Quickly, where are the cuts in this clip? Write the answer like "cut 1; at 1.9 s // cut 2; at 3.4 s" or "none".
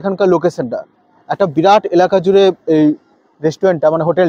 none